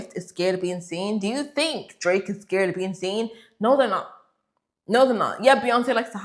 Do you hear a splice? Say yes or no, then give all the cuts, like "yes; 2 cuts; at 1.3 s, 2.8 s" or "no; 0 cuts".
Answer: no; 0 cuts